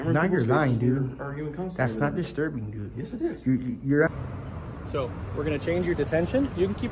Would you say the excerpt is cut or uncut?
cut